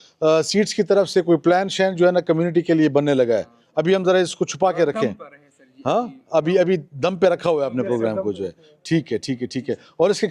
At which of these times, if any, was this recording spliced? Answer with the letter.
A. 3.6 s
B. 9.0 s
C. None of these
A